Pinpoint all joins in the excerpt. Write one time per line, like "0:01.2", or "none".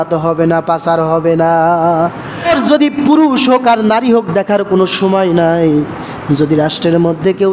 0:02.5